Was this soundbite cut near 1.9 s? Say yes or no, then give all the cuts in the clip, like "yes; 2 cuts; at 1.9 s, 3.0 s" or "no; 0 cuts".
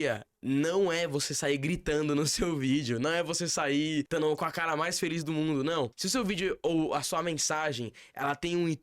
no; 2 cuts; at 4.1 s, 6.0 s